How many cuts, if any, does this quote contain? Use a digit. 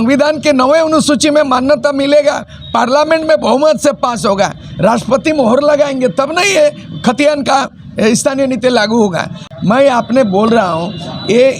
1